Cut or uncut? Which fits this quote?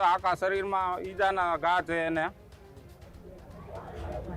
uncut